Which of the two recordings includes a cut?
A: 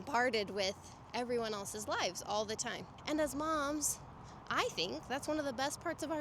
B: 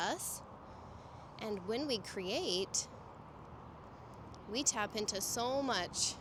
A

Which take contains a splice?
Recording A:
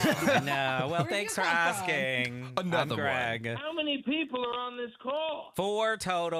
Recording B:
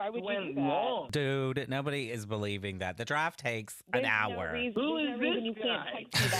B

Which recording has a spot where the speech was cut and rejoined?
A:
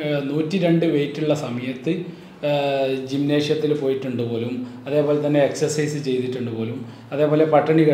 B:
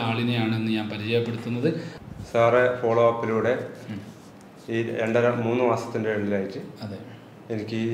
B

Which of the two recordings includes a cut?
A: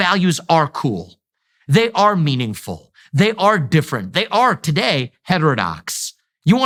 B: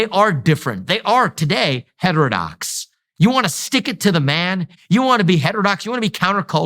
B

